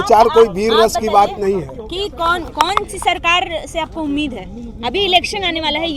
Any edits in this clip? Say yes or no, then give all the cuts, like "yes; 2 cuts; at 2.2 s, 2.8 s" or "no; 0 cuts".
no; 0 cuts